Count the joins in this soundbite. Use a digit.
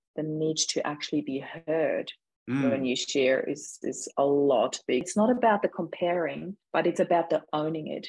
1